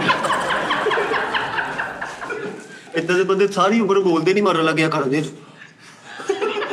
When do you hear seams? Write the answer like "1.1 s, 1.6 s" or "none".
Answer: 2.8 s